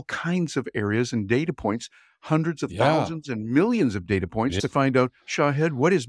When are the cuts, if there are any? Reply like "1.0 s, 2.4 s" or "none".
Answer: 4.6 s

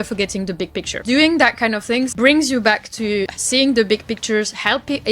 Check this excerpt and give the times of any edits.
0.9 s, 2.1 s, 3.4 s

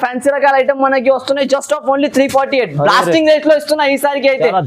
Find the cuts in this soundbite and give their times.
none

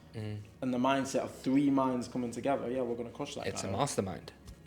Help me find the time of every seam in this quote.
none

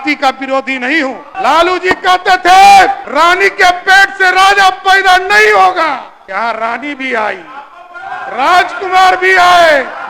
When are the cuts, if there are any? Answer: 1.3 s, 3.0 s, 6.1 s

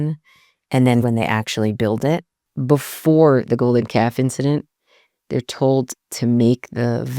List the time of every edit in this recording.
1.0 s, 2.5 s

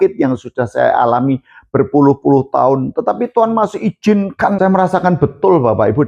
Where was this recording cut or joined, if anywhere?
4.6 s

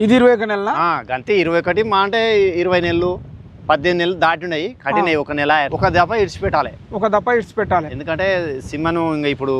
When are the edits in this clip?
5.7 s

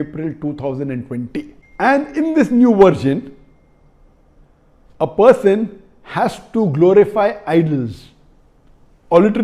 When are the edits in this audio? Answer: 1.6 s

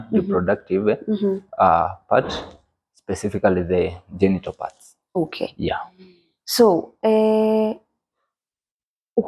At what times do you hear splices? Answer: none

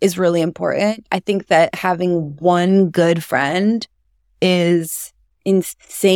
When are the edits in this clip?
none

